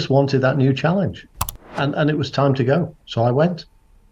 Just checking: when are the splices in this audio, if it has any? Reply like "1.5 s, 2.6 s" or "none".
none